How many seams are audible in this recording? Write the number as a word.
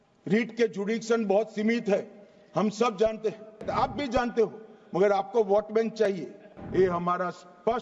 two